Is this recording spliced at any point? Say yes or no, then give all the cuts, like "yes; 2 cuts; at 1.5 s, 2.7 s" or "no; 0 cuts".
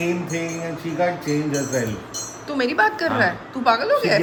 no; 0 cuts